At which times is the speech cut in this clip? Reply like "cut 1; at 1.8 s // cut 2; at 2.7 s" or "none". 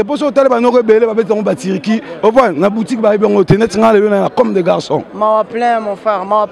cut 1; at 5.1 s